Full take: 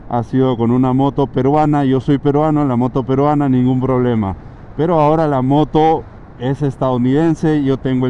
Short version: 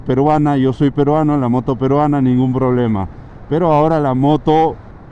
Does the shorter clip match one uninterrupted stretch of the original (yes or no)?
yes